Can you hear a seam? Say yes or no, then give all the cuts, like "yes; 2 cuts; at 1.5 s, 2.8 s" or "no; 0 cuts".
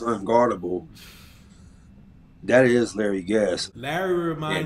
yes; 1 cut; at 3.6 s